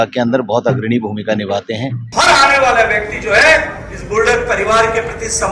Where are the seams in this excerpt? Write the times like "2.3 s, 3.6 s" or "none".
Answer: 2.0 s